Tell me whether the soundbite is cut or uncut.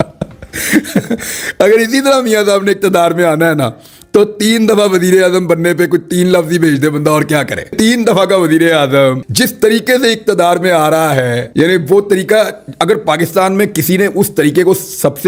uncut